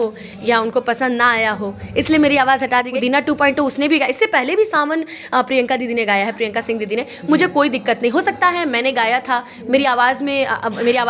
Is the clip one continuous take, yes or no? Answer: no